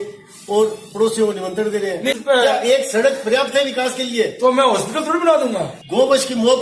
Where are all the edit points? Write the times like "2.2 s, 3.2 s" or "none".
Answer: 2.2 s, 5.7 s